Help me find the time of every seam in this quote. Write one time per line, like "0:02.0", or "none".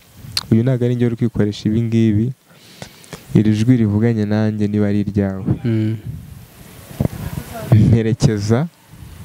none